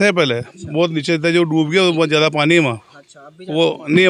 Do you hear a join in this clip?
no; 0 cuts

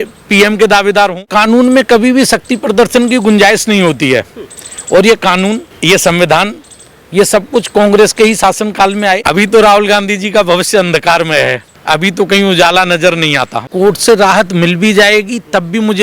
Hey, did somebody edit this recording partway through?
yes; 5 cuts; at 1.3 s, 5.7 s, 9.2 s, 11.7 s, 13.7 s

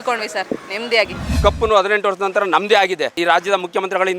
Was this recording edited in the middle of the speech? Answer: yes; 2 cuts; at 1.4 s, 3.2 s

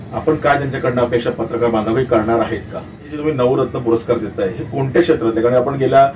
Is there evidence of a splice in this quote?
yes; 1 cut; at 3.0 s

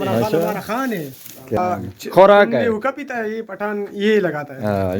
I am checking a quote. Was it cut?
yes; 1 cut; at 1.6 s

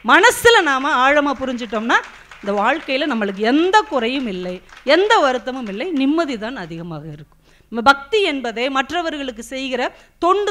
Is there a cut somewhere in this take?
no; 0 cuts

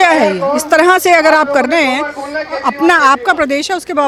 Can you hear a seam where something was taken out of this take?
no; 0 cuts

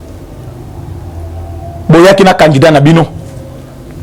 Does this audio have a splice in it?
no; 0 cuts

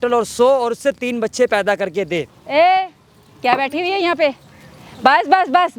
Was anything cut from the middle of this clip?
yes; 1 cut; at 2.4 s

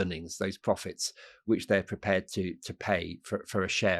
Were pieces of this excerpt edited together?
no; 0 cuts

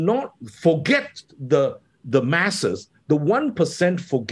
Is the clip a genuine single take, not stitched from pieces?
yes; 0 cuts

